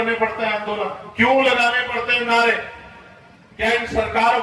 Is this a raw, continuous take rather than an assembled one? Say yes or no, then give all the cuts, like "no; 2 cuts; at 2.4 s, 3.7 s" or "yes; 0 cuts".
no; 1 cut; at 1.0 s